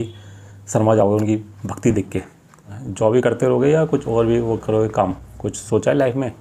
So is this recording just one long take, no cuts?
no; 1 cut; at 2.8 s

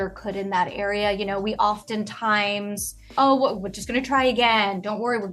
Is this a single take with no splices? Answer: no; 1 cut; at 3.1 s

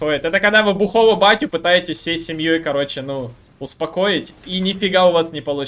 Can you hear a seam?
no; 0 cuts

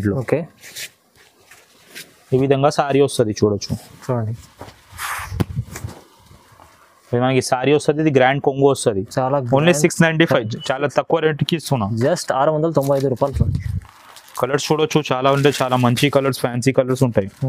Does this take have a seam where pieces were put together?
no; 0 cuts

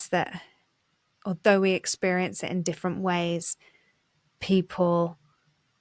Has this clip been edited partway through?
no; 0 cuts

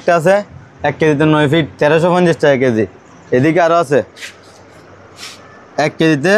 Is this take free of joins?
yes; 0 cuts

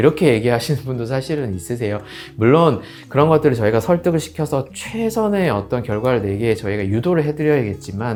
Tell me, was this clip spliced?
no; 0 cuts

